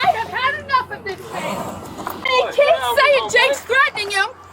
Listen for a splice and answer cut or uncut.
cut